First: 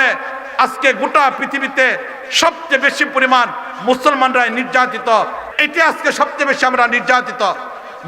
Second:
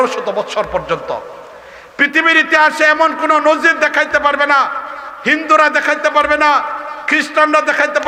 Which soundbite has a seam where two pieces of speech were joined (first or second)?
first